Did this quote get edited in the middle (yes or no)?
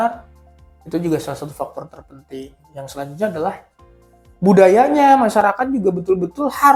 no